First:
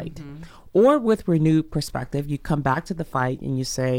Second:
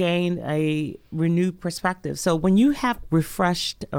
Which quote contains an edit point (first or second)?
second